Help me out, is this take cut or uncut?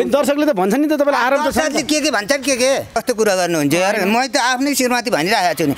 cut